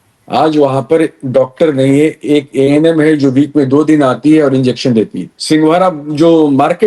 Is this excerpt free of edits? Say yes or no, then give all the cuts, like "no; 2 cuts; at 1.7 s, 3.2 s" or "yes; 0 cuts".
no; 1 cut; at 5.3 s